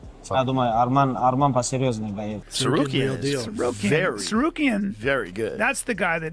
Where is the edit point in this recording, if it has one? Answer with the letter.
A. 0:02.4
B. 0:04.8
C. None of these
A